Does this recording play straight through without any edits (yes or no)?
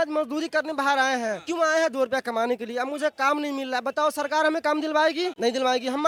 yes